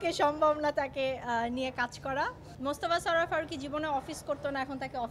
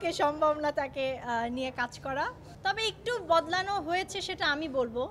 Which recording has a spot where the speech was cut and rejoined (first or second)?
first